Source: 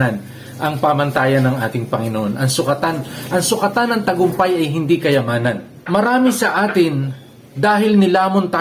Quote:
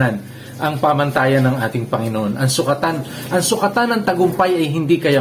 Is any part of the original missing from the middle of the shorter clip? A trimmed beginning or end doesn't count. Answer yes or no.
no